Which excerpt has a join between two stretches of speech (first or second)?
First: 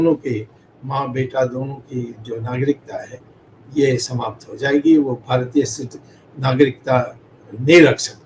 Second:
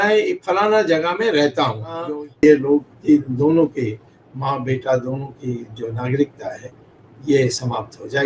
second